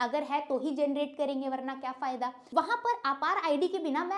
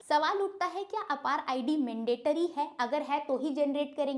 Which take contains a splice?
first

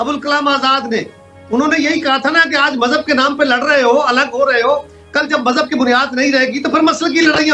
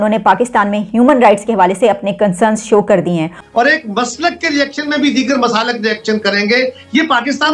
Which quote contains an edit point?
second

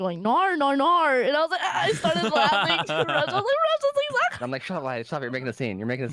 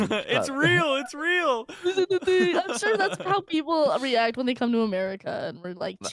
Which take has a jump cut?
second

